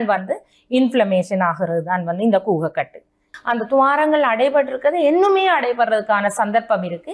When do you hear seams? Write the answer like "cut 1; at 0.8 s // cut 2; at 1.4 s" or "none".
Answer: cut 1; at 3.3 s